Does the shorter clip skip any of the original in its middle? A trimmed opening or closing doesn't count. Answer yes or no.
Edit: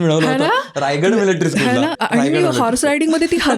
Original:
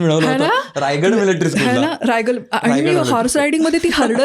yes